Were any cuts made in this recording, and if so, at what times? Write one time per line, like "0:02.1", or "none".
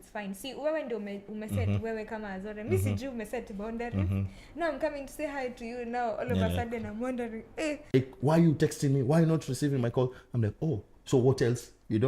0:07.9